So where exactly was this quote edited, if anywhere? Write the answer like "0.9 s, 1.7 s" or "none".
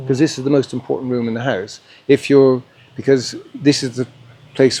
none